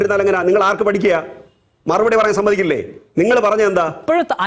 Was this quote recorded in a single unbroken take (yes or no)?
yes